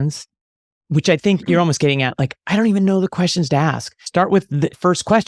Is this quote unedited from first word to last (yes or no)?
yes